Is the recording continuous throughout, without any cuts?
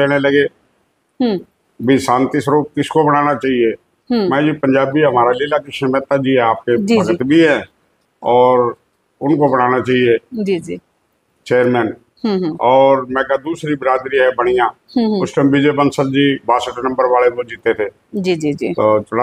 yes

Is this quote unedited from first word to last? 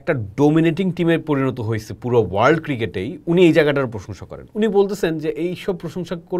yes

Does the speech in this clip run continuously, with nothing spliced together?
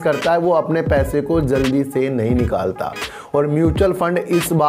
yes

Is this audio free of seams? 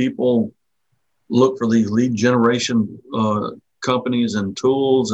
yes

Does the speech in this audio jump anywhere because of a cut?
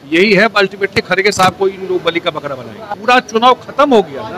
yes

